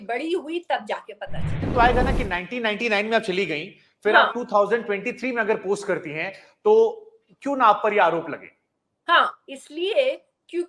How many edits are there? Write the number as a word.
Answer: one